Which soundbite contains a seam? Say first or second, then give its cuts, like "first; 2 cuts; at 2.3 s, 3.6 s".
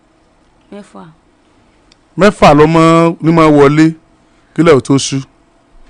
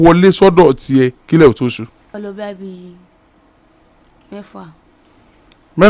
second; 1 cut; at 2.1 s